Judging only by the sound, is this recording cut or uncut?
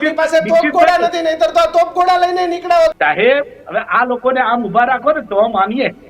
cut